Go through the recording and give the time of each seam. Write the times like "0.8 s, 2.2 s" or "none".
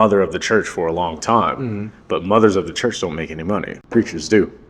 3.8 s

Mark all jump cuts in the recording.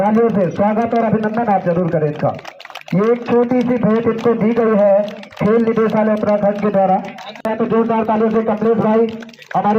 7.5 s

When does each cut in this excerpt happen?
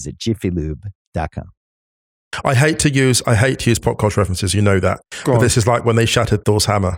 2.2 s

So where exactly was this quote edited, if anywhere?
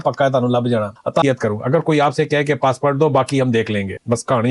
1.2 s

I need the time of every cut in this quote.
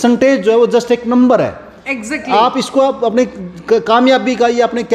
none

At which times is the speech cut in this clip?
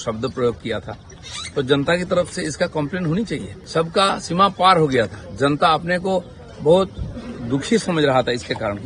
3.6 s

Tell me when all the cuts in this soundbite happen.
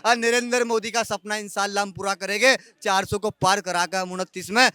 none

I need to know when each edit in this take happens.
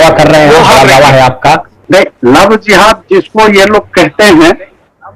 1.7 s

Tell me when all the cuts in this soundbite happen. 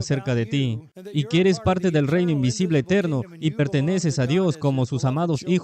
0.9 s

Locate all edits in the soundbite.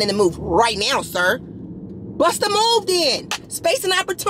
none

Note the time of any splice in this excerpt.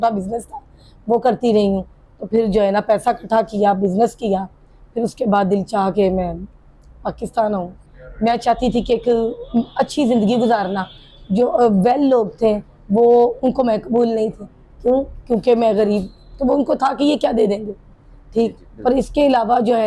7.9 s

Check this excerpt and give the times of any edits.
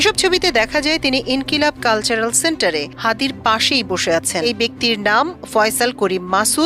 4.4 s

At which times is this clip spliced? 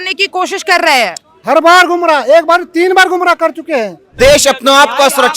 4.0 s

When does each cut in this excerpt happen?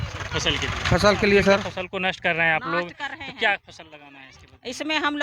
1.8 s

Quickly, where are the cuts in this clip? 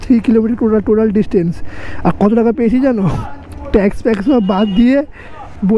none

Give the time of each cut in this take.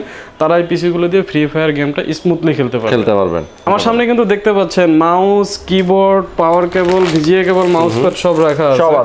3.7 s

